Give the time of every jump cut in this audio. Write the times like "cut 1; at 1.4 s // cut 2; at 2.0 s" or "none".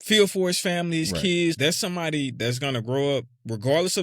cut 1; at 1.6 s